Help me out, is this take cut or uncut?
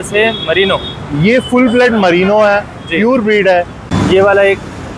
cut